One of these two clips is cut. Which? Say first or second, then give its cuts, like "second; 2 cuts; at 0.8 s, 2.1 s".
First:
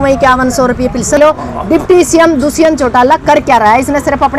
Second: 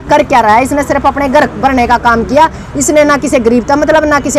first; 1 cut; at 1.2 s